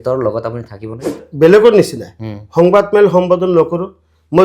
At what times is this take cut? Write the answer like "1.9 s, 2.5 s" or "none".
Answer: 1.1 s